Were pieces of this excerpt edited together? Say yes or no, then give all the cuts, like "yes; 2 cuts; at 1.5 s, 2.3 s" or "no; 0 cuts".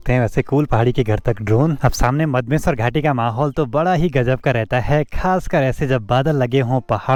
no; 0 cuts